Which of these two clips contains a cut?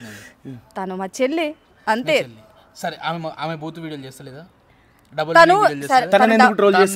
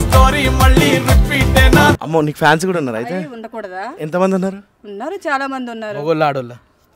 second; 1 cut; at 2.0 s

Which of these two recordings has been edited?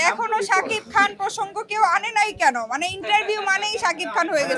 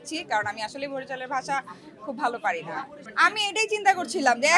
second; 1 cut; at 3.0 s

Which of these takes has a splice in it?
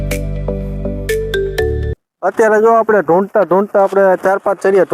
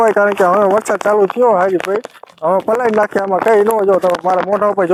first; 1 cut; at 1.9 s

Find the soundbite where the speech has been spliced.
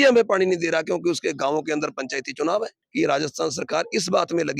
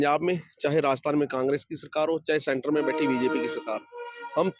first; 1 cut; at 2.8 s

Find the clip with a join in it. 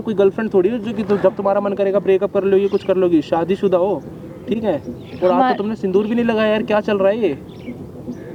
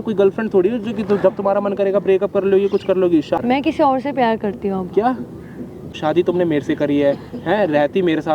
second; 2 cuts; at 3.4 s, 6.0 s

